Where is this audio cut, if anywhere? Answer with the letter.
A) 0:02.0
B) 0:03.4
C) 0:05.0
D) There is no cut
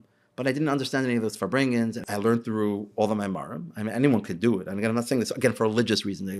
A